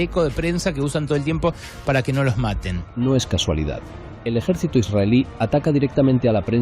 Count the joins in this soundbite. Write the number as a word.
one